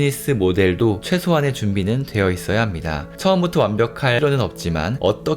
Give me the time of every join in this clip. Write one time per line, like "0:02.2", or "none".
0:04.2

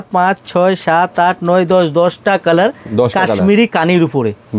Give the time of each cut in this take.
none

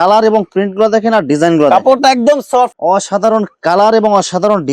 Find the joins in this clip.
0:02.8

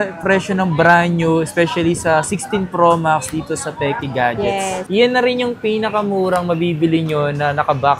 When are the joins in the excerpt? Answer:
0:04.8

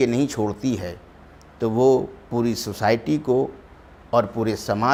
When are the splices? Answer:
none

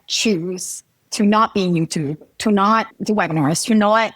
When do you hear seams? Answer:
0:02.9

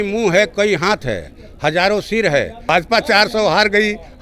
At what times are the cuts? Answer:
0:02.7

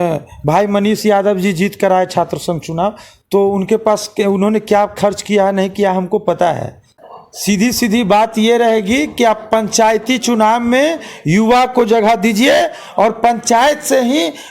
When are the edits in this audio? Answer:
0:06.9

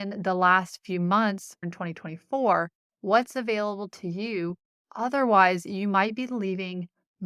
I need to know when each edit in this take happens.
0:01.7

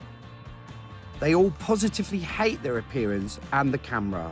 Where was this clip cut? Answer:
0:03.2

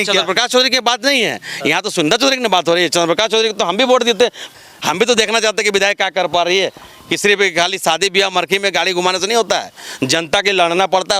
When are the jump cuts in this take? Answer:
0:04.4

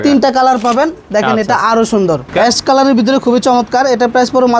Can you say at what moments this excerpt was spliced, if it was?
0:02.3

